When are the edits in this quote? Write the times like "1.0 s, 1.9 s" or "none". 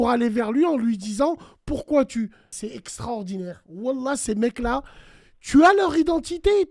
2.5 s